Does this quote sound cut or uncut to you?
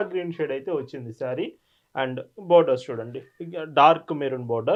uncut